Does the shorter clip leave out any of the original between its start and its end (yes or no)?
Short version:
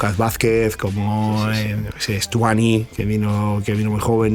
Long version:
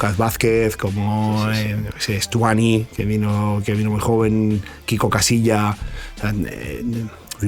no